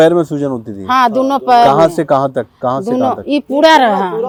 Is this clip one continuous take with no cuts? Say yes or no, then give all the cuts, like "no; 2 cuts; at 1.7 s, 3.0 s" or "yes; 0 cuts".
yes; 0 cuts